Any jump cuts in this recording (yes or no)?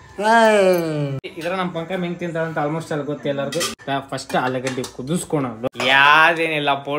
yes